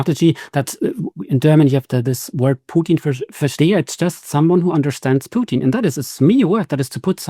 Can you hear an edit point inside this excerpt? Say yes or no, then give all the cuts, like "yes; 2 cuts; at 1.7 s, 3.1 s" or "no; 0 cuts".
no; 0 cuts